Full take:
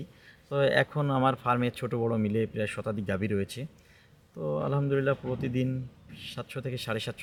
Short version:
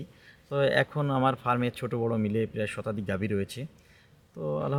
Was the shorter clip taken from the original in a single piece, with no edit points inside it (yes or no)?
yes